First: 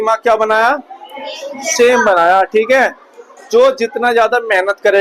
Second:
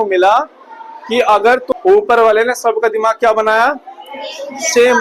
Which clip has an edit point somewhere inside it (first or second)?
second